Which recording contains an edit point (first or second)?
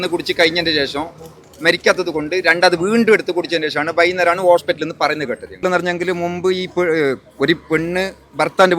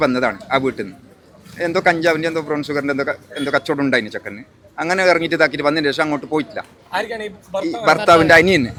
first